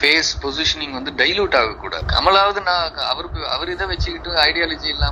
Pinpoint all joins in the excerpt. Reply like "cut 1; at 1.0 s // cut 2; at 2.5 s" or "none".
cut 1; at 1.9 s